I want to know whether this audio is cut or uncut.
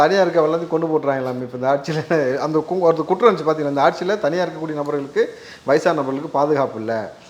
uncut